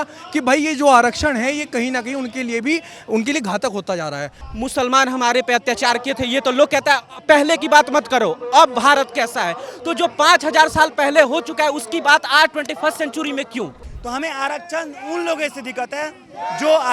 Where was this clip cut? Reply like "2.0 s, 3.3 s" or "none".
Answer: 4.4 s, 13.9 s